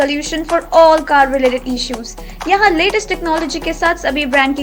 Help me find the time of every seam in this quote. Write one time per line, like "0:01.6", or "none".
none